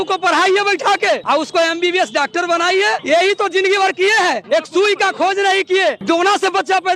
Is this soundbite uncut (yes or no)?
no